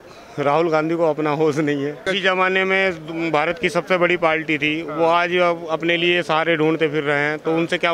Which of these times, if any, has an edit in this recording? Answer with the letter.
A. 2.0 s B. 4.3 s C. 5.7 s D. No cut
A